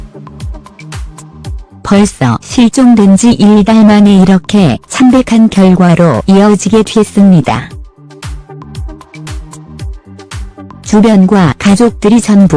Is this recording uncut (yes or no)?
no